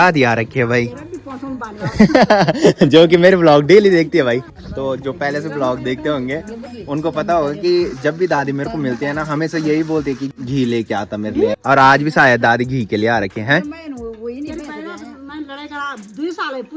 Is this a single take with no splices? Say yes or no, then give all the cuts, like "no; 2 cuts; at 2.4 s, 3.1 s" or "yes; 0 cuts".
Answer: yes; 0 cuts